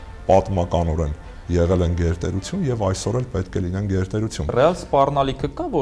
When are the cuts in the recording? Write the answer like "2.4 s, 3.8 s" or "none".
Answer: 4.5 s